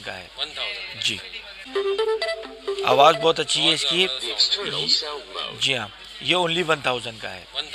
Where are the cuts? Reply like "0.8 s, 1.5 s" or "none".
none